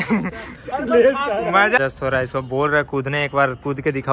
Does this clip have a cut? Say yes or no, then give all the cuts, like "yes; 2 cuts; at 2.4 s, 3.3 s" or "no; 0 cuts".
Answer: yes; 1 cut; at 1.8 s